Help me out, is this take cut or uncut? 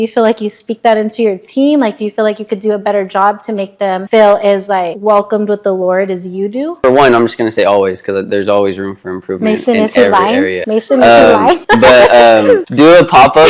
cut